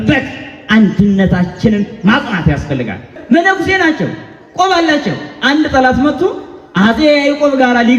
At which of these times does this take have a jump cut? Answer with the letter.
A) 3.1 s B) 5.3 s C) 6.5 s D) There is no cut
A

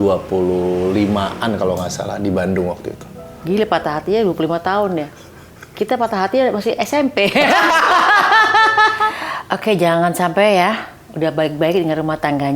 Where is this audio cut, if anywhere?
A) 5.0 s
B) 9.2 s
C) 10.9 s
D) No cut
B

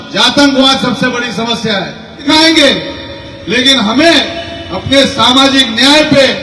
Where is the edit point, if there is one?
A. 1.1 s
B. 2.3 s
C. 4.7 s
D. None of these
B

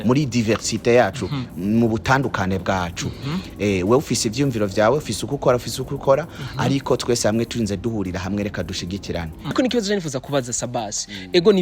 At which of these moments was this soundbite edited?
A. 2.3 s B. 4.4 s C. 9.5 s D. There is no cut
C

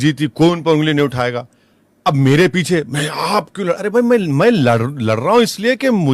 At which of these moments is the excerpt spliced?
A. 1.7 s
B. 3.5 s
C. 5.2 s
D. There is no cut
D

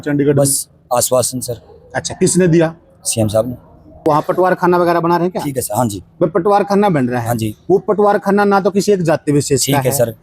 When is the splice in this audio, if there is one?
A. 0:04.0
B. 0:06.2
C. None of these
A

